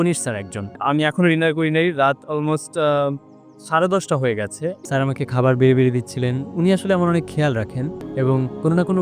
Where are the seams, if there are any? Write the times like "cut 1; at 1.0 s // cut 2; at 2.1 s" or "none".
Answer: cut 1; at 0.8 s // cut 2; at 4.7 s // cut 3; at 8.0 s